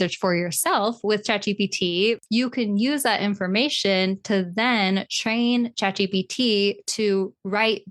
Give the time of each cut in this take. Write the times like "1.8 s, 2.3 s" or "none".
2.2 s